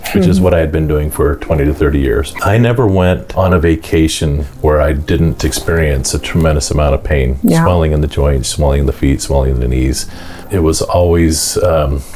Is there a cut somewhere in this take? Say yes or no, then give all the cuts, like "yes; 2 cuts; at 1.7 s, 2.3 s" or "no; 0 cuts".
yes; 4 cuts; at 2.3 s, 3.3 s, 4.4 s, 10.4 s